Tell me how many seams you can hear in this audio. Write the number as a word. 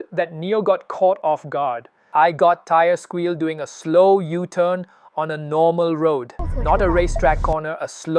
one